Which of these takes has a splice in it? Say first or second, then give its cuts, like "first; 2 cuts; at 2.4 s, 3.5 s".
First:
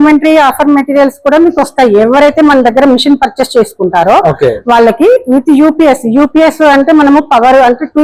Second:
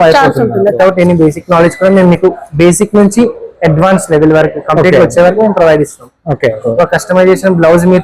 second; 2 cuts; at 0.8 s, 6.6 s